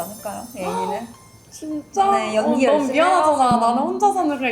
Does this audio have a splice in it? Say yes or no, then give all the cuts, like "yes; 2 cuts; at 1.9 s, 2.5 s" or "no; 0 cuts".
no; 0 cuts